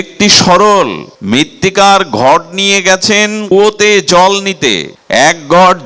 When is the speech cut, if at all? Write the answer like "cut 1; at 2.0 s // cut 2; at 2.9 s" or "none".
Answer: cut 1; at 1.1 s // cut 2; at 3.4 s // cut 3; at 4.9 s